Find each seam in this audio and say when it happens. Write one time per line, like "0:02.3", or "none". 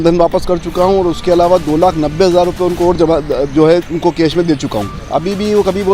0:05.0